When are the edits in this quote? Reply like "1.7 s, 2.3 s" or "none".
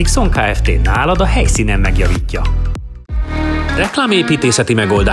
3.0 s